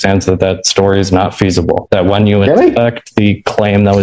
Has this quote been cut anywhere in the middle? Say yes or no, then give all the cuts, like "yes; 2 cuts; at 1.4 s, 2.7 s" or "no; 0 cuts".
no; 0 cuts